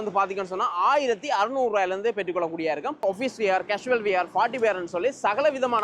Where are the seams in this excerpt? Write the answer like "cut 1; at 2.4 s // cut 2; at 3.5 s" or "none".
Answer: cut 1; at 3.0 s